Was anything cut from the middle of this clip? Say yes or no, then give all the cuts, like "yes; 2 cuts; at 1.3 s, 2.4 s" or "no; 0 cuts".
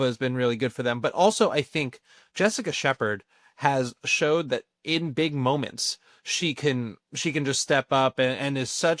no; 0 cuts